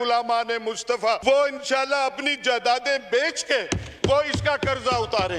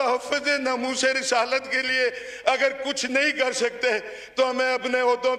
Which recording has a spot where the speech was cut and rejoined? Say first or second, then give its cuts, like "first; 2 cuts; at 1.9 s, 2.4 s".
first; 1 cut; at 1.2 s